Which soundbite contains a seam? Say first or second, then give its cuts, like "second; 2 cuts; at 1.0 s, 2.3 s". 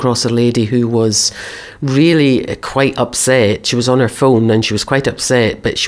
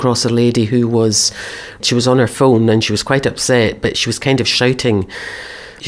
second; 1 cut; at 1.8 s